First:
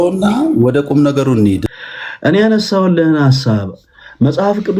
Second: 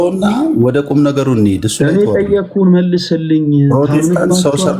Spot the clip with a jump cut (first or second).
first